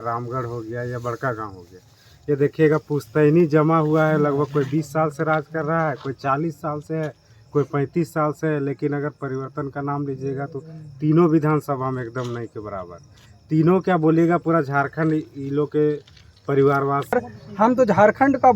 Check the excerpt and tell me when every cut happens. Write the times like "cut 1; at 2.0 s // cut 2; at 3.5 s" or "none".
cut 1; at 17.1 s